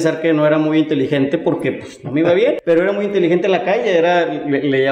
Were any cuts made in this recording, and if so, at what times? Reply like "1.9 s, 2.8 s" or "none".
2.6 s